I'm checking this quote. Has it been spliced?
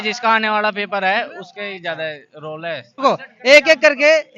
yes; 1 cut; at 3.0 s

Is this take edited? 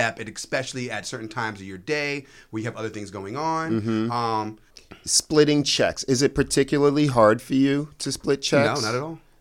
yes; 1 cut; at 4.7 s

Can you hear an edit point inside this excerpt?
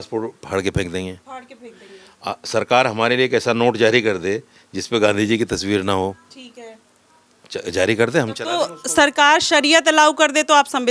no; 0 cuts

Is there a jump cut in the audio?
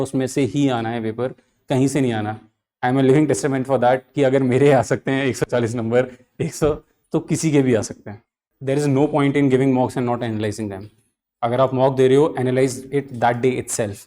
yes; 1 cut; at 8.5 s

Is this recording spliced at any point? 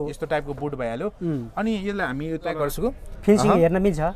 yes; 1 cut; at 2.7 s

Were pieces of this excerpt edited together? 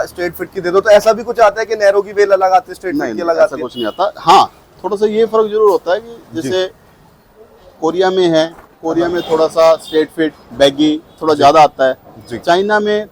no; 0 cuts

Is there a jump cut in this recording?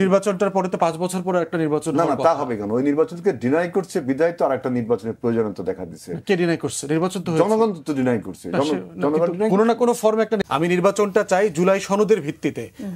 yes; 1 cut; at 10.4 s

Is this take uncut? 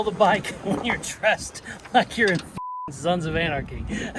yes; 0 cuts

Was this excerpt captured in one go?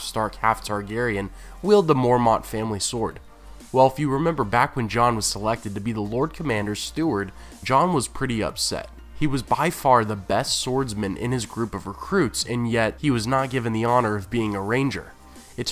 no; 1 cut; at 1.5 s

